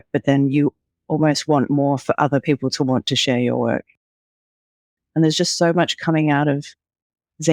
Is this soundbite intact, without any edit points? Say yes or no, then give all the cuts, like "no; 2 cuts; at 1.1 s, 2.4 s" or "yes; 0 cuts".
no; 1 cut; at 4.5 s